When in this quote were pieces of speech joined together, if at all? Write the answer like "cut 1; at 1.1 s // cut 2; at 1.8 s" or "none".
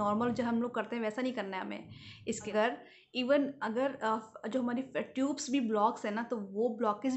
cut 1; at 2.5 s